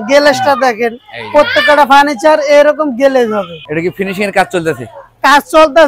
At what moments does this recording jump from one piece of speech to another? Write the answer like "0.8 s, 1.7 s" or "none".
3.6 s